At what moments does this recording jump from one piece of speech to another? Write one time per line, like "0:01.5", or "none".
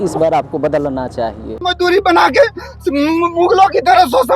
0:01.5